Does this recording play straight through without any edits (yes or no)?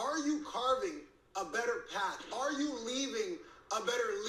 yes